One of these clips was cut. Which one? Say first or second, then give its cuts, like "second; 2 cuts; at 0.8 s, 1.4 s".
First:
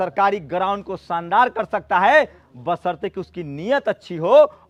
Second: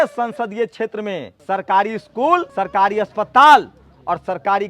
second; 2 cuts; at 1.3 s, 2.5 s